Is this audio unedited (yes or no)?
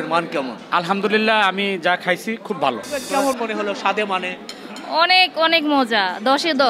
no